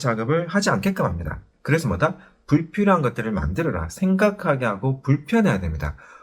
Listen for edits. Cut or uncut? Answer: cut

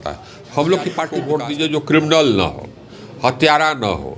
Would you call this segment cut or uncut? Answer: cut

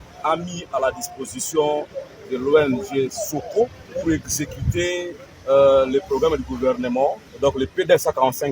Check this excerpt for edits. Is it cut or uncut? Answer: cut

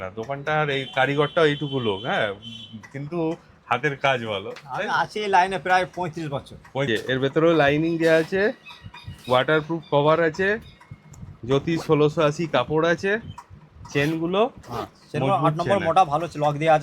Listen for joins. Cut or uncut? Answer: cut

